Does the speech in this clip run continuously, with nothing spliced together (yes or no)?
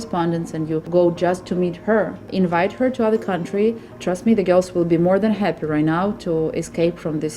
no